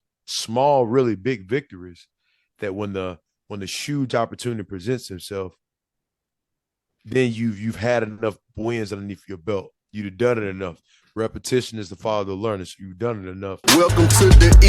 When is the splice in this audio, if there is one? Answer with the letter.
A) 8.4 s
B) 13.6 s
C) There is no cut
B